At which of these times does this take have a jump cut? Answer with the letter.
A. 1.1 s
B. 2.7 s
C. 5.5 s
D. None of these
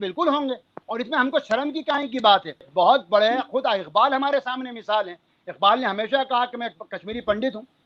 B